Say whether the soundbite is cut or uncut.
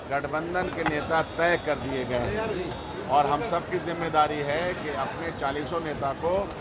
uncut